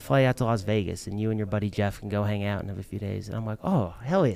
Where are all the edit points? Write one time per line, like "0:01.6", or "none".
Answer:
none